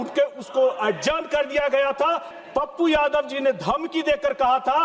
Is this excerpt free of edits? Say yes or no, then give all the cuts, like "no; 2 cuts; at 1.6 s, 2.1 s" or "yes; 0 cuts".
no; 1 cut; at 2.3 s